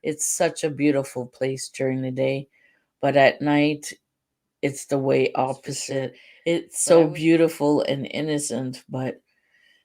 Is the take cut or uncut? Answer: cut